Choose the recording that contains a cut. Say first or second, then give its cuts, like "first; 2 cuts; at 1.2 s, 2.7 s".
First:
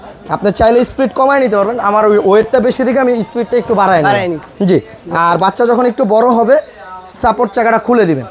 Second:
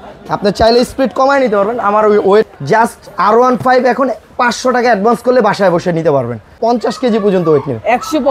second; 2 cuts; at 2.5 s, 6.6 s